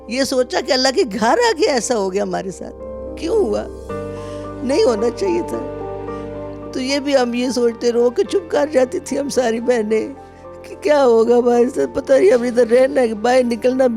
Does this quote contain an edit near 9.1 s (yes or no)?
no